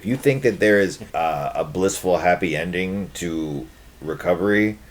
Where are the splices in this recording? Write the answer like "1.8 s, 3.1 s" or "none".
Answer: 1.0 s

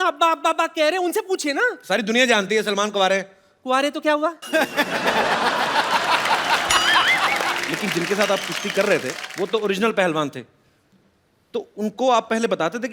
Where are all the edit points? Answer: 7.6 s, 9.2 s

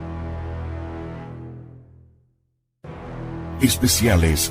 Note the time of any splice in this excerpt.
3.6 s

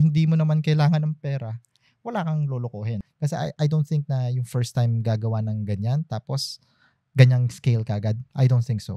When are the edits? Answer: 3.0 s

